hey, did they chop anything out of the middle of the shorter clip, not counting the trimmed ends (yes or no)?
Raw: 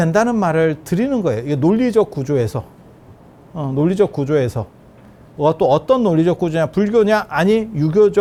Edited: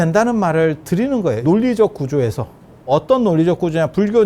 yes